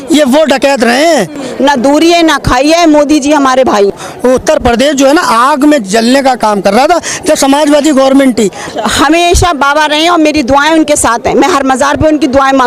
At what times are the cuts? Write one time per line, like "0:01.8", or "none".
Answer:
0:01.4
0:03.9
0:08.6